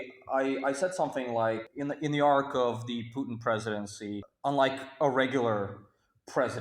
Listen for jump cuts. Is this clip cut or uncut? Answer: cut